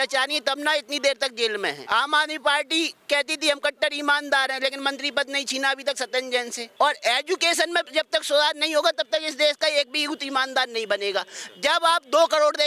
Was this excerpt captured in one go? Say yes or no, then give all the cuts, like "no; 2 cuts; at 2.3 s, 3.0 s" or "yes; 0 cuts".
no; 2 cuts; at 1.8 s, 6.6 s